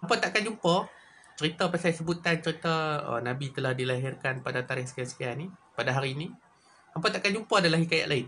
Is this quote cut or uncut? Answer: uncut